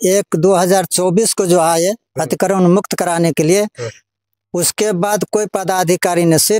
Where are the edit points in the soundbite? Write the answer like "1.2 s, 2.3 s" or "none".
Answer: none